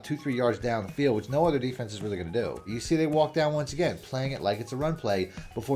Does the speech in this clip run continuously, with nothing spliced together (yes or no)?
no